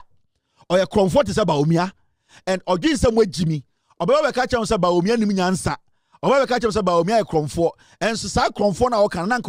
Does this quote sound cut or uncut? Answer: uncut